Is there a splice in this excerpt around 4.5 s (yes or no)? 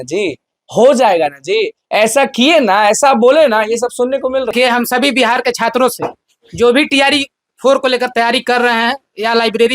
yes